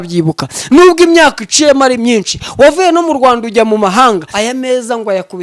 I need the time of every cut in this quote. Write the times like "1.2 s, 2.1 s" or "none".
4.3 s